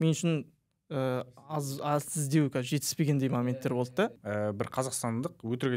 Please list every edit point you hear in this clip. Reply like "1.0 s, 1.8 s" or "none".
4.2 s

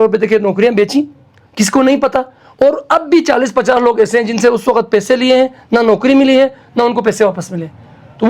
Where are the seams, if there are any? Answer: none

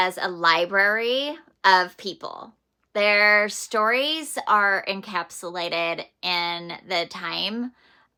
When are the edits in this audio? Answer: none

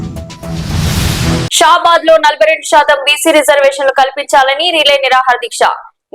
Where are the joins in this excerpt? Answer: 1.5 s

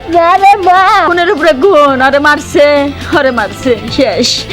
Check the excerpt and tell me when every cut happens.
1.1 s

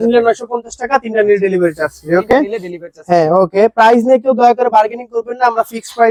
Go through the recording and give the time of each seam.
none

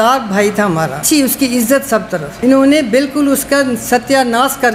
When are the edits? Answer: 1.0 s

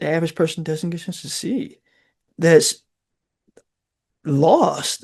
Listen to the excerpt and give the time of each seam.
2.3 s

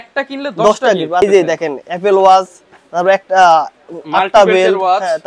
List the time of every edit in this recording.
1.2 s

